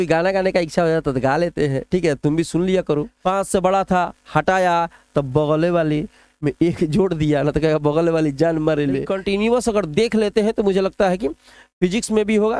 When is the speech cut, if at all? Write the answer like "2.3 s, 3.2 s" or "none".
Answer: 3.1 s, 9.1 s